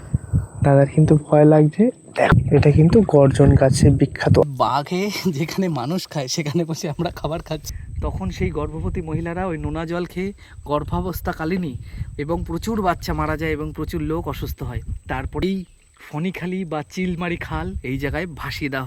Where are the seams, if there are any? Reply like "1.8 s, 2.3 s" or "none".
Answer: 2.3 s, 4.4 s, 7.7 s, 15.4 s